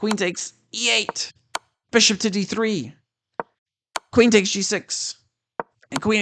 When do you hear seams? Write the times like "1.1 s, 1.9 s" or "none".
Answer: 1.8 s